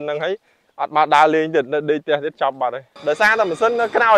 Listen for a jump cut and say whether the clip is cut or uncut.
cut